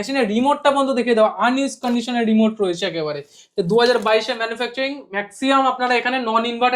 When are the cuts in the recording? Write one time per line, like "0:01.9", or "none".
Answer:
none